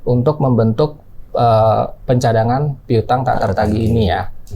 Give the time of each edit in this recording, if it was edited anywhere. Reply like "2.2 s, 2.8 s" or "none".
none